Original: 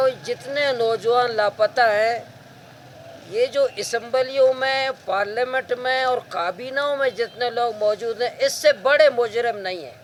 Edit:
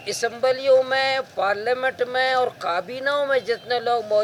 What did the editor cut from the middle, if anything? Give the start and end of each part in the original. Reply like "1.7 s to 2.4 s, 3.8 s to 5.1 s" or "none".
none